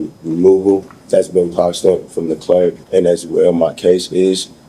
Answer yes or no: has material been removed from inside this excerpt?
yes